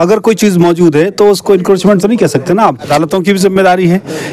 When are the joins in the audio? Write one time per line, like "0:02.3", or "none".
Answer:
0:02.9

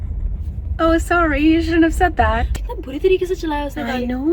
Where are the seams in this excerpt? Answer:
0:02.5

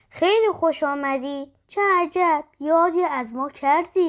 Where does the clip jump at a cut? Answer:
none

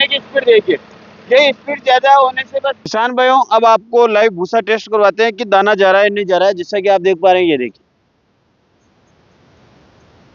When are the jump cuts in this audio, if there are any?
0:02.8

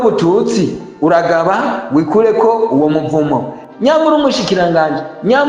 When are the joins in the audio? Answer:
0:03.6

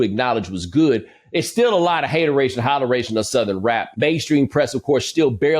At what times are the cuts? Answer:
0:03.9

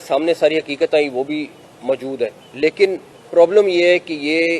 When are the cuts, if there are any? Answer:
0:01.9
0:03.1

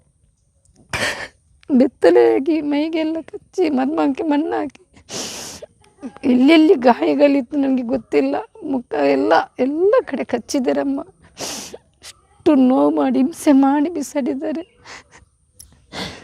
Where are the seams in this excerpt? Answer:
none

